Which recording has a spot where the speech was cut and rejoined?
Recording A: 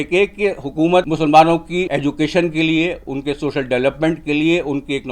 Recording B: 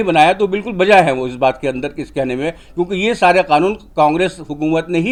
A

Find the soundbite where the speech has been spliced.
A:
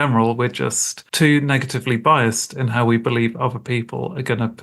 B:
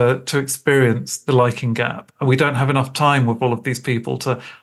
A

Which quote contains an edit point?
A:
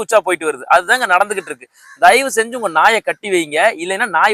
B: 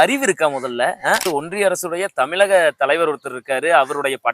B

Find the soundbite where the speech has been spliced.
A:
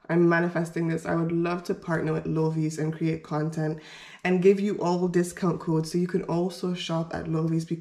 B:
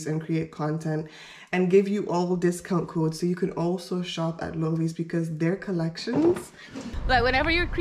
B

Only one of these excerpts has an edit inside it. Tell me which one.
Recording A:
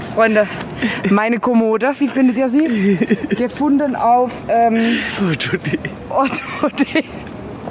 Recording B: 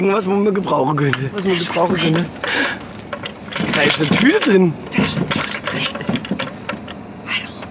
B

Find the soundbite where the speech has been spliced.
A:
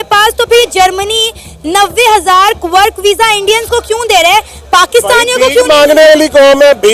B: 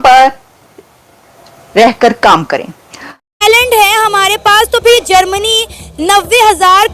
B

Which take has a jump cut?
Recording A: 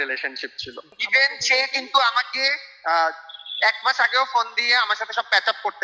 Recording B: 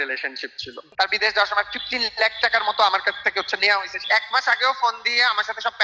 B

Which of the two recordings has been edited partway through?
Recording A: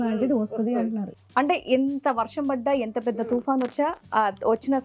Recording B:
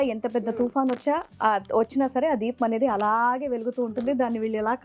A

